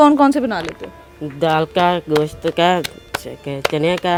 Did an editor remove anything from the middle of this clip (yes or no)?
no